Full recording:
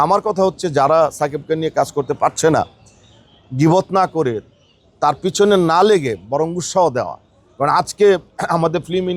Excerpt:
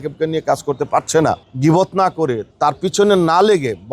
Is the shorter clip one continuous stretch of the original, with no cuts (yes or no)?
no